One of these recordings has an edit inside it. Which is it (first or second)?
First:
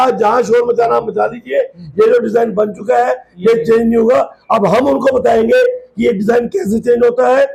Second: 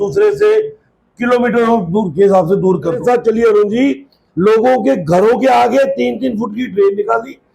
second